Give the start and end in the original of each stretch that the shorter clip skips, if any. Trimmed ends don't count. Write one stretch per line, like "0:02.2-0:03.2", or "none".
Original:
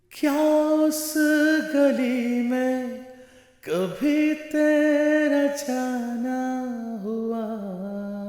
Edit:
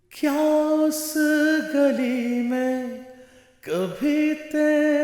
none